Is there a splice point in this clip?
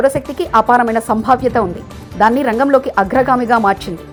no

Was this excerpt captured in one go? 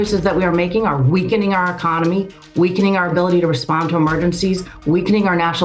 yes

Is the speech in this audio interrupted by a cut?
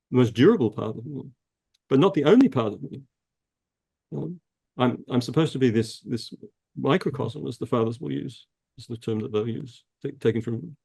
no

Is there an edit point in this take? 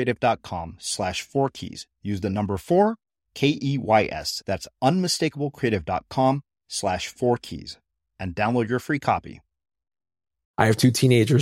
yes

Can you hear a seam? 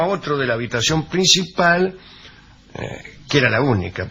no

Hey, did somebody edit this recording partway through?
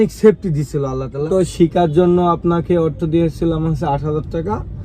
yes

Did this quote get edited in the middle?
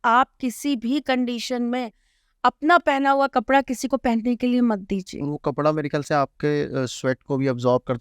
no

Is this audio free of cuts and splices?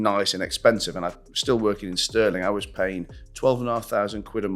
yes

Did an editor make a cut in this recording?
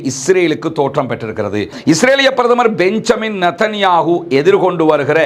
yes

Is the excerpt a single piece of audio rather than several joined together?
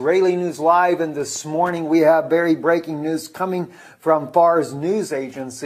no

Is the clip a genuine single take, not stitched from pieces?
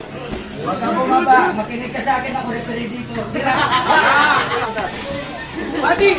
no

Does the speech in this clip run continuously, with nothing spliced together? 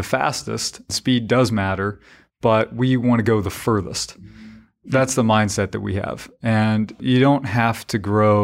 no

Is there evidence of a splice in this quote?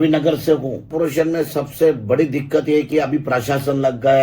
yes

